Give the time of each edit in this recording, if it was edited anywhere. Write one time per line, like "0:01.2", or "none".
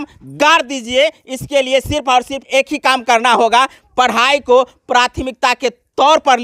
0:02.4